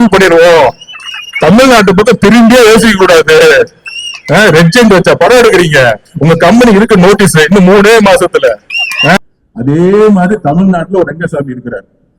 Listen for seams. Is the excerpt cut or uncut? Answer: cut